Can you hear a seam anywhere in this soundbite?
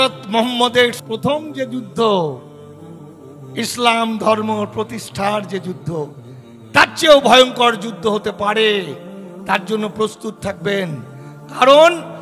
yes; 1 cut; at 1.0 s

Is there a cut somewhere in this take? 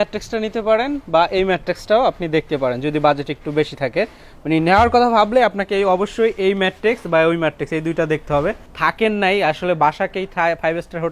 yes; 1 cut; at 8.7 s

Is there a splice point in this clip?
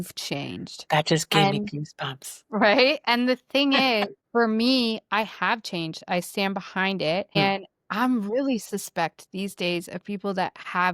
yes; 2 cuts; at 4.2 s, 7.4 s

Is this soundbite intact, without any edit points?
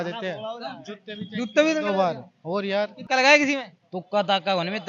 no; 1 cut; at 3.0 s

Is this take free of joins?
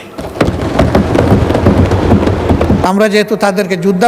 no; 1 cut; at 2.8 s

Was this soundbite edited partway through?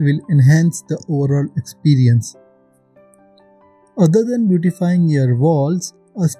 yes; 2 cuts; at 2.3 s, 3.9 s

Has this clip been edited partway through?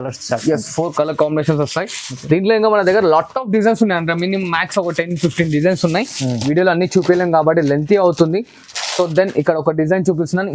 no; 0 cuts

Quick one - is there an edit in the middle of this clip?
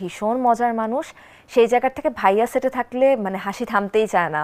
no; 0 cuts

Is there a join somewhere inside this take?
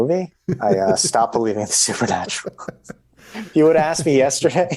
no; 0 cuts

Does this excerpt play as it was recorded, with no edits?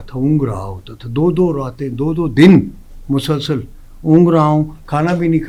yes; 0 cuts

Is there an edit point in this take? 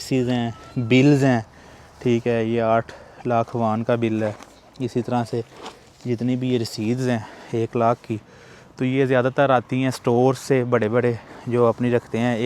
no; 0 cuts

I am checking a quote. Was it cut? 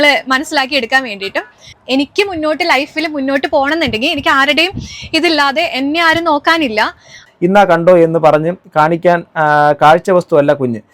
yes; 2 cuts; at 1.7 s, 7.2 s

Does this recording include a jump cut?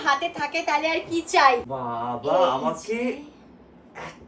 yes; 1 cut; at 1.8 s

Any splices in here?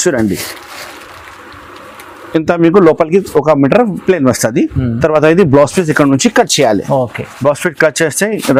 no; 0 cuts

